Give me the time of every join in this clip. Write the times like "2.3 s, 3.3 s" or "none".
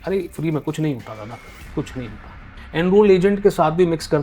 2.5 s